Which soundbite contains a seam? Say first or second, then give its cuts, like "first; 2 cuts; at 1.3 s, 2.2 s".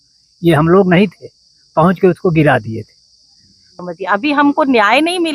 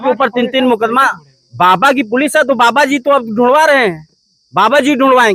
first; 1 cut; at 3.7 s